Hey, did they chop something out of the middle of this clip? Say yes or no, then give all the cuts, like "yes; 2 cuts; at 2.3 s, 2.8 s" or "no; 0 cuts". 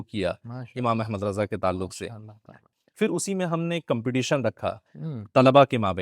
yes; 1 cut; at 2.6 s